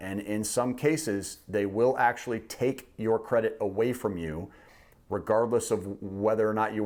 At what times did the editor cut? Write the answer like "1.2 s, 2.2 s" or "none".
none